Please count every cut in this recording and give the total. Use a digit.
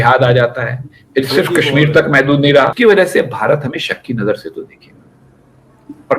1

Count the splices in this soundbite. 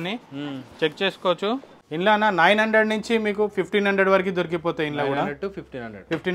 1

